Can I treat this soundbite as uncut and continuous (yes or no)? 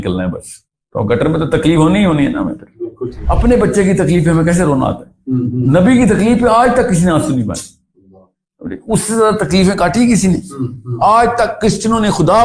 no